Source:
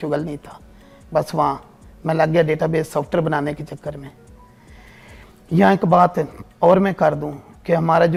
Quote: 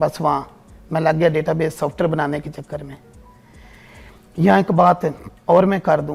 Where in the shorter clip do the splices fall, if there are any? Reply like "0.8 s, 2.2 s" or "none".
none